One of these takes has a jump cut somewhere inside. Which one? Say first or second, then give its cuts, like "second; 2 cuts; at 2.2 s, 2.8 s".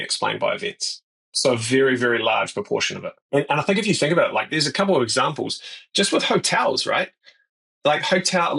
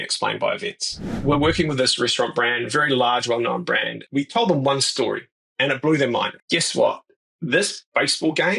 second; 3 cuts; at 1.2 s, 4.0 s, 6.3 s